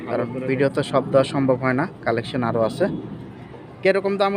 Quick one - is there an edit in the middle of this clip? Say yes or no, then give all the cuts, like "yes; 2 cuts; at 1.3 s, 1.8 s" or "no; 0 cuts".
no; 0 cuts